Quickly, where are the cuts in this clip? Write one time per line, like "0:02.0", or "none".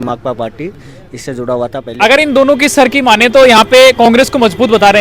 0:01.8